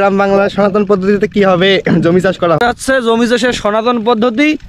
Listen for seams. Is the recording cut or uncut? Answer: cut